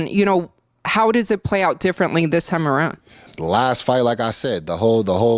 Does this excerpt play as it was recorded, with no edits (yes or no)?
no